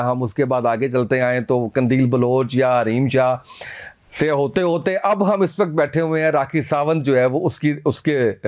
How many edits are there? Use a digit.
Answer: 1